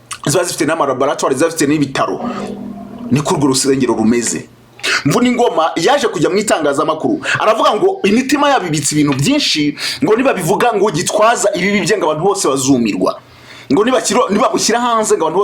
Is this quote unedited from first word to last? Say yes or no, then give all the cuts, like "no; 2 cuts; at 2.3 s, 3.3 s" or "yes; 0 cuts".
no; 1 cut; at 4.9 s